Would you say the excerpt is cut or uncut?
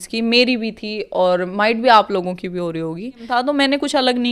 cut